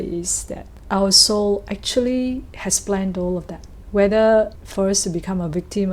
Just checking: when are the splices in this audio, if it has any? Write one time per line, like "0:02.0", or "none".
none